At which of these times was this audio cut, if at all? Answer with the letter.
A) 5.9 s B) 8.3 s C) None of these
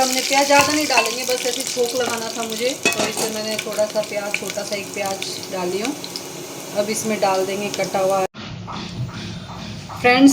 B